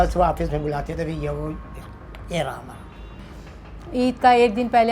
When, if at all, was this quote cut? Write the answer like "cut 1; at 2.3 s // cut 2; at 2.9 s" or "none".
cut 1; at 3.2 s